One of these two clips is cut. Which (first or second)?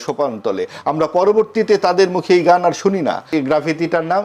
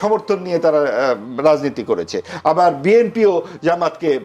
first